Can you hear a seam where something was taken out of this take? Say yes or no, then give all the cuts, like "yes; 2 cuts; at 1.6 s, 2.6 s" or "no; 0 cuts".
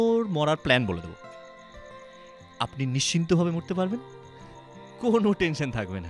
no; 0 cuts